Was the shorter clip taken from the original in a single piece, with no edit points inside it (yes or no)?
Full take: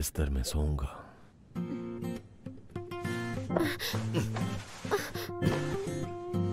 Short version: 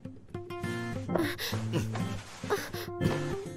yes